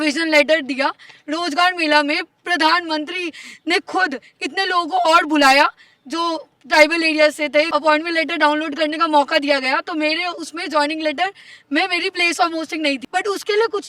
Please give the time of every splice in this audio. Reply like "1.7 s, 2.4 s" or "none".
7.7 s, 13.0 s